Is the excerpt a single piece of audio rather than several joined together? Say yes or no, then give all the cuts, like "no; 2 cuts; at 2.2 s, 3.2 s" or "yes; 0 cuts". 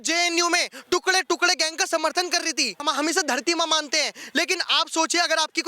no; 1 cut; at 2.9 s